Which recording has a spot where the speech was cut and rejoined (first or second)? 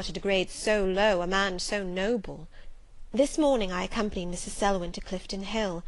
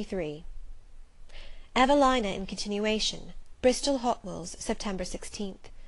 second